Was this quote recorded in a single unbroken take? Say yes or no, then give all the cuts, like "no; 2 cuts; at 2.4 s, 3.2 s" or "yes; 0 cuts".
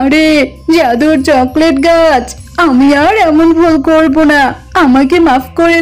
yes; 0 cuts